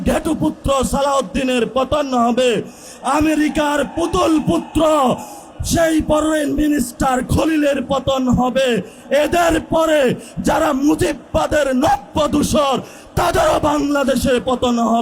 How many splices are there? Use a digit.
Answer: 0